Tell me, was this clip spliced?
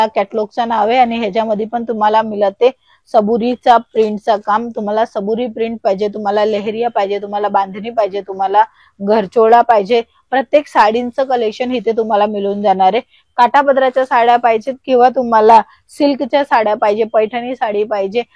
no; 0 cuts

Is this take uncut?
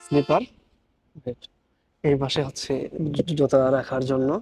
yes; 0 cuts

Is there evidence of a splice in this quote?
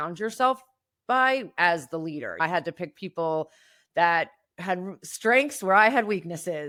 no; 0 cuts

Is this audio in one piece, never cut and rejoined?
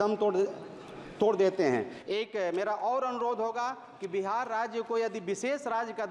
yes; 0 cuts

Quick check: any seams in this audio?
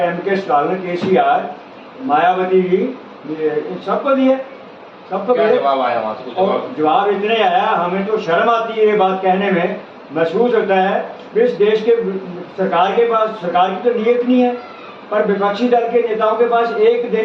no; 0 cuts

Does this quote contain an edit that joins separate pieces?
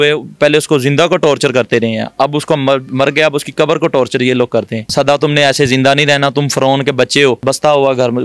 yes; 2 cuts; at 4.8 s, 7.4 s

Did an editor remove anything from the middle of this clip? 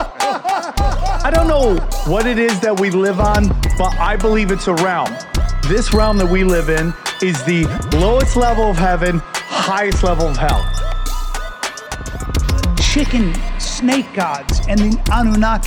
no; 0 cuts

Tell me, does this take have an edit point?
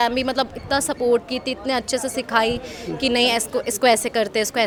no; 0 cuts

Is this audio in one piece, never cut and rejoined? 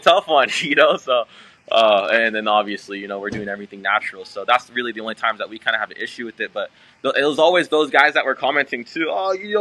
yes; 0 cuts

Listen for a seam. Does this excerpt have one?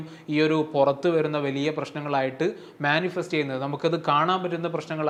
no; 0 cuts

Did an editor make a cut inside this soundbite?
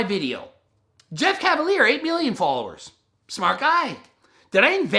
yes; 1 cut; at 1.0 s

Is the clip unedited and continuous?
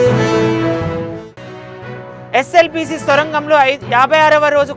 yes; 0 cuts

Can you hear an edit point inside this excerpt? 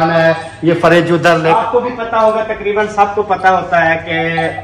yes; 1 cut; at 1.6 s

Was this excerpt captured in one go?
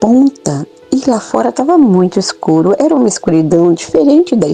yes; 0 cuts

